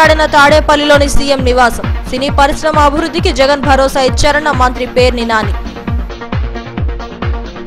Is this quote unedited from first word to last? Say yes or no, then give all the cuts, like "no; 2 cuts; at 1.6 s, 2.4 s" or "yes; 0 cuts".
yes; 0 cuts